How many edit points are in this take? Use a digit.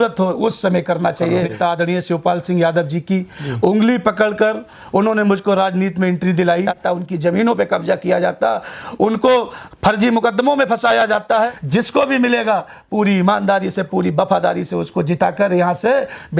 3